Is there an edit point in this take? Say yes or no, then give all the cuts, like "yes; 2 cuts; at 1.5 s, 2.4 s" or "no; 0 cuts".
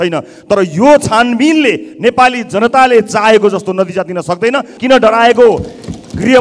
yes; 1 cut; at 4.7 s